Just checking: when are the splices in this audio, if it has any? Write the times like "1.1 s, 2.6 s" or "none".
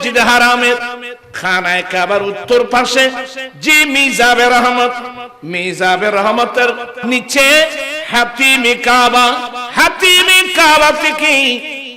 7.0 s

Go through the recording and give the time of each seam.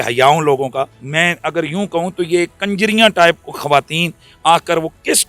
1.0 s

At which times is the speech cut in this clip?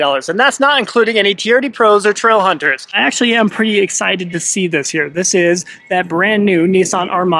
3.0 s

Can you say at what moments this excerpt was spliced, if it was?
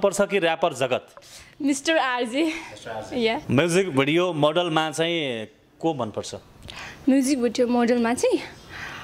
3.4 s

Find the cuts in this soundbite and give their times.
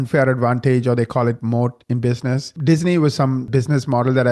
2.5 s, 3.5 s

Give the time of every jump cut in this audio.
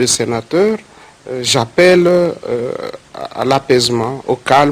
2.2 s

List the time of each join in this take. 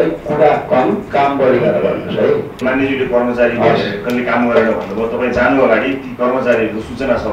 2.6 s

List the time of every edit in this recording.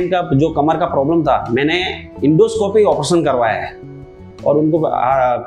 4.0 s

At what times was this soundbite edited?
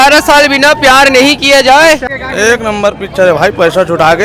2.2 s

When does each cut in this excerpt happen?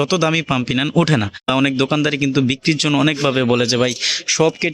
1.5 s

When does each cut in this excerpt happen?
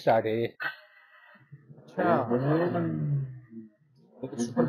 none

